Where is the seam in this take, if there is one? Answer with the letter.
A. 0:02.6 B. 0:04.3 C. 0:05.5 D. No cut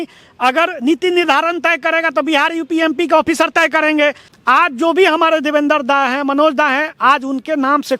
B